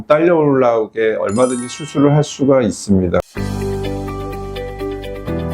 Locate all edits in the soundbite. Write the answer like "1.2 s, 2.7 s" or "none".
3.2 s